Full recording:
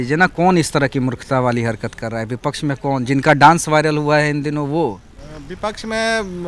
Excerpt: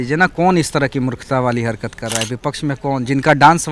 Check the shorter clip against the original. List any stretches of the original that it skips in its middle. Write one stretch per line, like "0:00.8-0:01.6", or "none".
none

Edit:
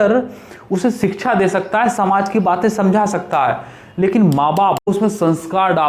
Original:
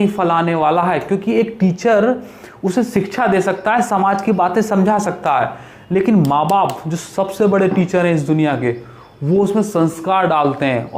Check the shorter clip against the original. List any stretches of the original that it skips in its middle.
0:06.8-0:09.4

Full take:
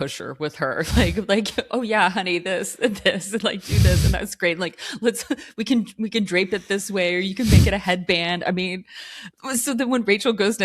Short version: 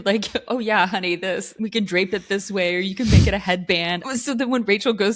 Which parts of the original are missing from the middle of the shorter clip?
0:02.7-0:05.9
0:08.4-0:09.4

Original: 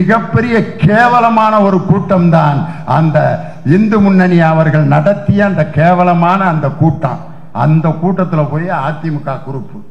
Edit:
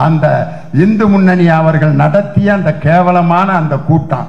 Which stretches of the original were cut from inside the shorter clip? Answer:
none

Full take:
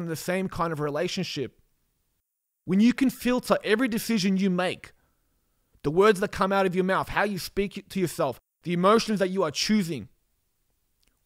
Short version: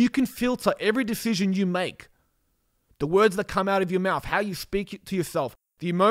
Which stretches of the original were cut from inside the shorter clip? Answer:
none

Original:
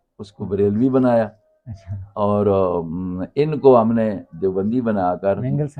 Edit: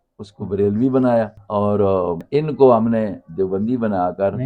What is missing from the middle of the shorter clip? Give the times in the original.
0:01.4-0:02.1
0:02.9-0:03.3

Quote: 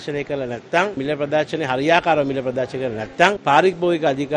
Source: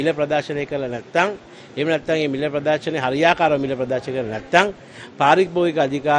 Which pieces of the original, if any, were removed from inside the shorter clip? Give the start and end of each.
0:01.4-0:02.3
0:04.7-0:05.1

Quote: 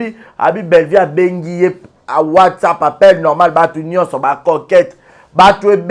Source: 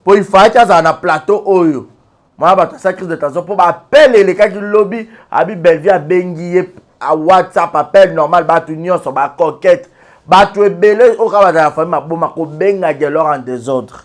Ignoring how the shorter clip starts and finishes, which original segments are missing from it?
none

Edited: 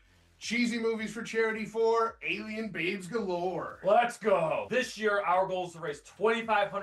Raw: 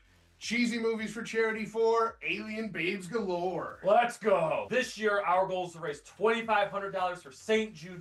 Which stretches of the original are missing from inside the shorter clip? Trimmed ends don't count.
none

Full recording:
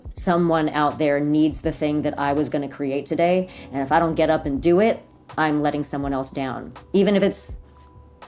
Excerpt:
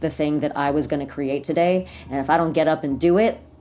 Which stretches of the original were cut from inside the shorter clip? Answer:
none

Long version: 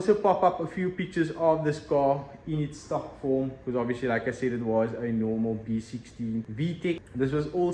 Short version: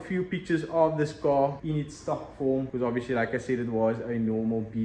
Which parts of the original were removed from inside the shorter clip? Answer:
0:02.3-0:02.4
0:03.5-0:03.6

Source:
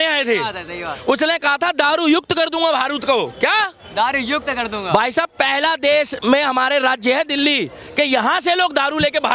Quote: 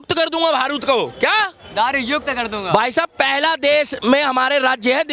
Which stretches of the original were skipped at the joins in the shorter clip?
none

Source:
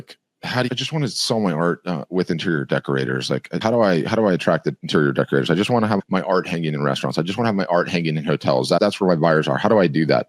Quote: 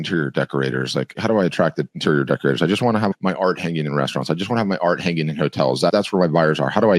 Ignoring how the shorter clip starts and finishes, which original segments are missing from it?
0:03.5-0:04.1

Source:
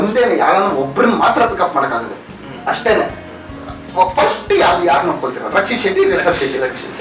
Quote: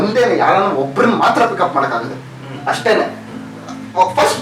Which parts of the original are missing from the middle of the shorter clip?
none

